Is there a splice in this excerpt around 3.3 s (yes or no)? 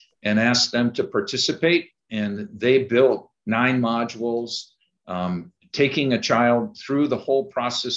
yes